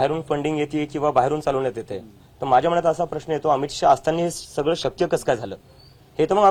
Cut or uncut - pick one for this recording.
uncut